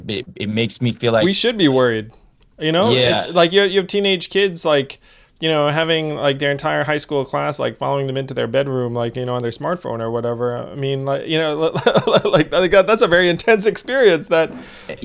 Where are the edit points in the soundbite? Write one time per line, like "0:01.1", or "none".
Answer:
0:01.2